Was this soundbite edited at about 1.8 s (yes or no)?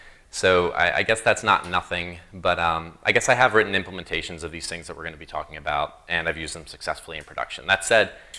yes